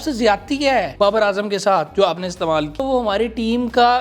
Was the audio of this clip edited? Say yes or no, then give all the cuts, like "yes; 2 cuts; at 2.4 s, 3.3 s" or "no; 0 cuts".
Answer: yes; 2 cuts; at 0.9 s, 2.8 s